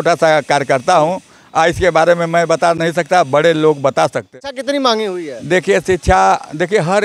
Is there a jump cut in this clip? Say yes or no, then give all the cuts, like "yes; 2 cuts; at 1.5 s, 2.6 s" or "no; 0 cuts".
yes; 1 cut; at 4.4 s